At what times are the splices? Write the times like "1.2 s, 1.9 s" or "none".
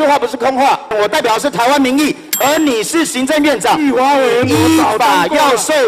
0.9 s